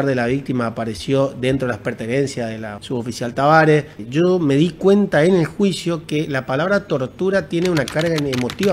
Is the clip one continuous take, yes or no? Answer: no